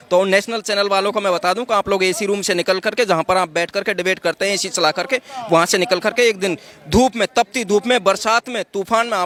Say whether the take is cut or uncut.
uncut